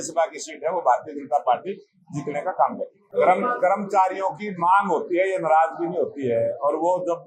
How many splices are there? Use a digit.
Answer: 1